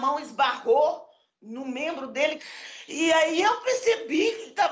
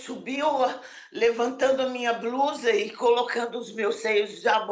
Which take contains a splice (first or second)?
first